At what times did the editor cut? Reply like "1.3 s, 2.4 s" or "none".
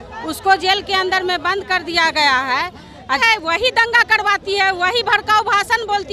3.1 s